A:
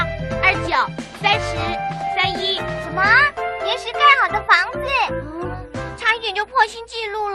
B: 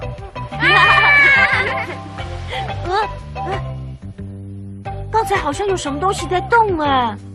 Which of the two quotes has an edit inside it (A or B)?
B